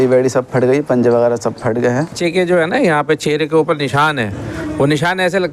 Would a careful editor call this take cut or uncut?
cut